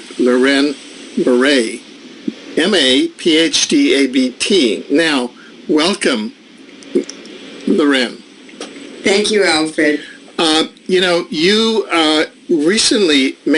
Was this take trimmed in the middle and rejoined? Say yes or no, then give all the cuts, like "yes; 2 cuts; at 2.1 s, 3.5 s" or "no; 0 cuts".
yes; 1 cut; at 5.7 s